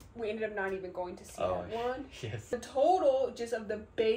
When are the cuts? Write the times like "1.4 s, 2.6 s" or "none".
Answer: 2.5 s